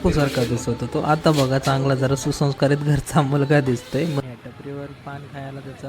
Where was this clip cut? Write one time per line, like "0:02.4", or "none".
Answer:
0:04.2